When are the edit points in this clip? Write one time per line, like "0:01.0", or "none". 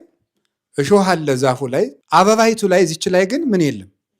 0:02.0